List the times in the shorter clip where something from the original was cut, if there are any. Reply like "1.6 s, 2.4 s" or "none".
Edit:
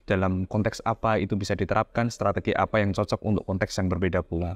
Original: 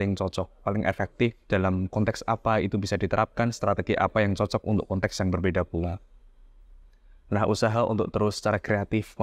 none